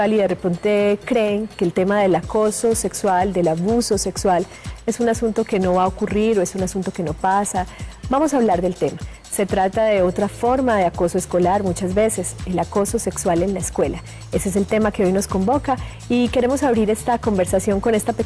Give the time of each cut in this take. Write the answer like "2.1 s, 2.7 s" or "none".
13.8 s